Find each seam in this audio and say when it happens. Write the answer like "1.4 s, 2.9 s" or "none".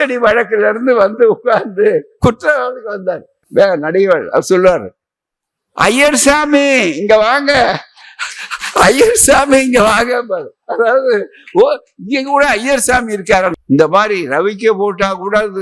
3.3 s, 13.6 s